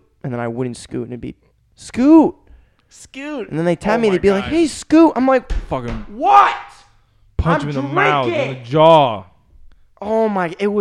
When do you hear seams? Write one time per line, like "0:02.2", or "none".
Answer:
none